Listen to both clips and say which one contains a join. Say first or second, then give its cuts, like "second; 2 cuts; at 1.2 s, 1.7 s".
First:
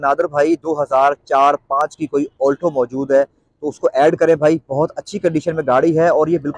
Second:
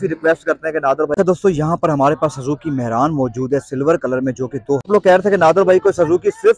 second; 2 cuts; at 1.1 s, 4.9 s